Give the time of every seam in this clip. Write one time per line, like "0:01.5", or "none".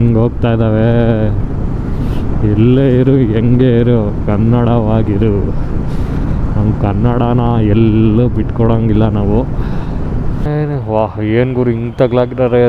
0:10.4